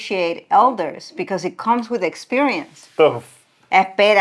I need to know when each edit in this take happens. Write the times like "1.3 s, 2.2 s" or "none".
none